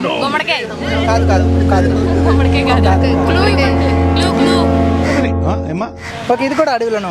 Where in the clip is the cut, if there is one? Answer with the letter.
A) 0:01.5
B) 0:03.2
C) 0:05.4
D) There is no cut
D